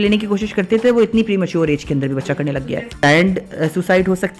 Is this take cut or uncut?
cut